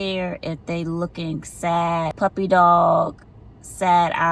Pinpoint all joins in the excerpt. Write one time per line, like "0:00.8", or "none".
0:02.1